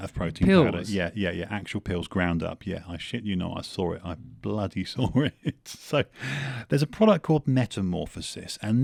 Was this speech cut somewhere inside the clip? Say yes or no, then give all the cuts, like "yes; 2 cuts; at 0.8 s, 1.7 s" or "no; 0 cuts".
no; 0 cuts